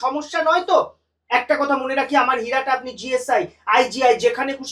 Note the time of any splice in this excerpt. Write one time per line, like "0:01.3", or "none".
none